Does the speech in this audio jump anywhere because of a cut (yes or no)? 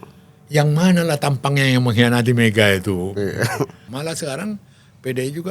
yes